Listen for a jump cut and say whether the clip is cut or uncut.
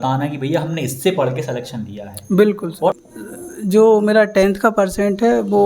cut